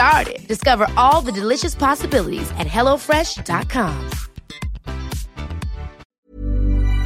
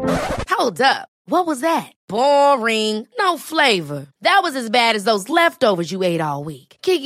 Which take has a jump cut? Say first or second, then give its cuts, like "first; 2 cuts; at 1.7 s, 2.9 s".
first; 1 cut; at 6.1 s